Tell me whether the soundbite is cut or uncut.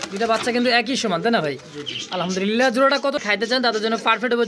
cut